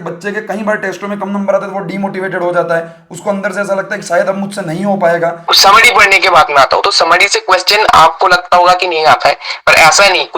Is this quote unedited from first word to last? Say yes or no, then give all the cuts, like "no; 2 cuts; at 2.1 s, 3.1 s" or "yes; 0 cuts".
no; 1 cut; at 5.5 s